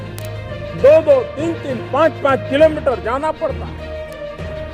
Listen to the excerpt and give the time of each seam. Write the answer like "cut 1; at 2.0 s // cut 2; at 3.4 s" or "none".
cut 1; at 3.6 s